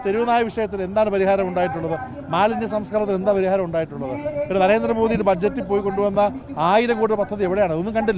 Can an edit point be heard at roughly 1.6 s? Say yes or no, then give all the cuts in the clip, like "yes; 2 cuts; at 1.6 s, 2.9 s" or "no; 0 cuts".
no; 0 cuts